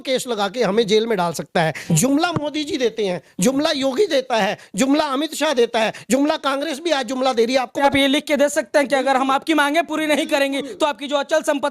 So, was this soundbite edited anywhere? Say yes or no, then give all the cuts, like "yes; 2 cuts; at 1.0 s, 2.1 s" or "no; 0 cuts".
yes; 2 cuts; at 1.8 s, 7.8 s